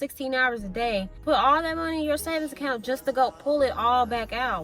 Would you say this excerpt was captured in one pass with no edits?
no; 1 cut; at 1.2 s

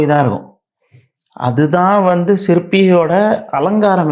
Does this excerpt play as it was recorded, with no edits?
yes; 0 cuts

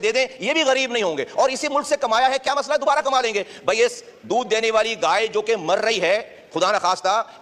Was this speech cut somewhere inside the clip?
no; 0 cuts

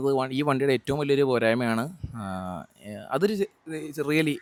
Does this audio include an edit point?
no; 0 cuts

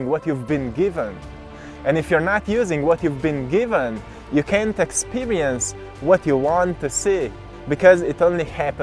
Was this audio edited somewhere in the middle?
yes; 1 cut; at 7.5 s

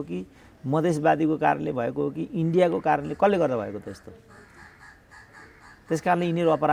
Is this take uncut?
yes; 0 cuts

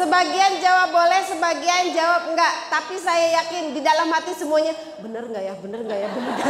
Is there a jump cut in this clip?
no; 0 cuts

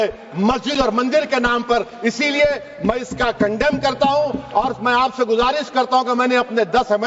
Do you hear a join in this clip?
no; 0 cuts

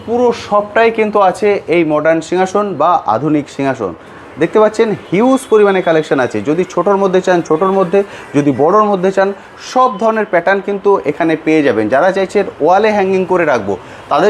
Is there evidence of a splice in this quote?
no; 0 cuts

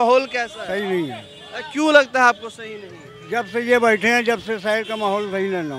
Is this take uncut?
yes; 0 cuts

